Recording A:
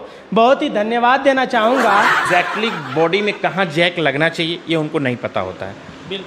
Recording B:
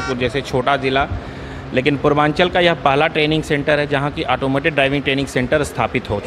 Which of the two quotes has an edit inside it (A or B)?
A